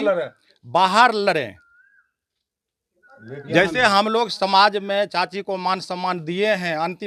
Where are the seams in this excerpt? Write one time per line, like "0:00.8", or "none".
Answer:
none